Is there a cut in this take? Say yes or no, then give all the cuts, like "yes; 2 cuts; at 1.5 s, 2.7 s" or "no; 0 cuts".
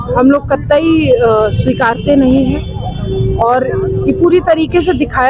no; 0 cuts